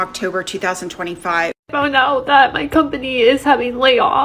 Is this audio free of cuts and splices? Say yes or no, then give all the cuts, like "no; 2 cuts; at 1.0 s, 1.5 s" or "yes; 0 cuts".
no; 1 cut; at 1.7 s